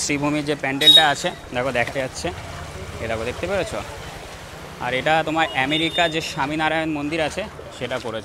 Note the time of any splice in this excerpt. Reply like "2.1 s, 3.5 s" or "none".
none